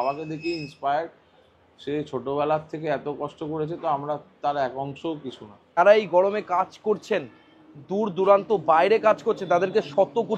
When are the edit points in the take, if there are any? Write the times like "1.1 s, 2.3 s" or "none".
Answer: 5.6 s